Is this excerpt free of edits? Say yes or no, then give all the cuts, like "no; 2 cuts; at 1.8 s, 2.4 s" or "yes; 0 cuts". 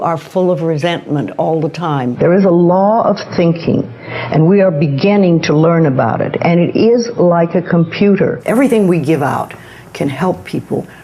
no; 2 cuts; at 2.1 s, 8.4 s